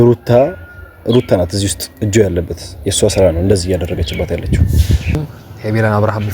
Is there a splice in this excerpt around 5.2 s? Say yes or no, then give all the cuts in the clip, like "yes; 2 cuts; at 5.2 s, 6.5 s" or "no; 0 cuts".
yes; 1 cut; at 5.2 s